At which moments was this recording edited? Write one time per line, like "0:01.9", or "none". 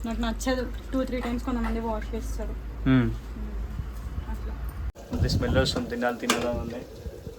0:04.9